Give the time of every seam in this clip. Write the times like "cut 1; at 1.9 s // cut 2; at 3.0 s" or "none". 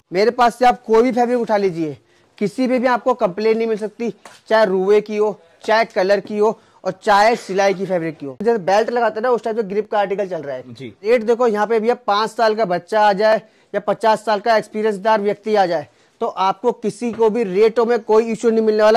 cut 1; at 8.4 s // cut 2; at 11.1 s